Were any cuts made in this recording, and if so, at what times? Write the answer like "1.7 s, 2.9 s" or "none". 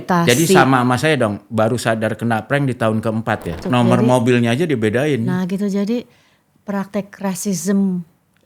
3.6 s